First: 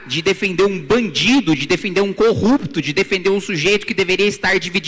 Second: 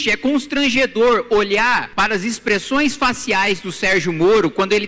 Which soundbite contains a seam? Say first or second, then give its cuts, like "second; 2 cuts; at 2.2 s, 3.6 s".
second; 1 cut; at 1.9 s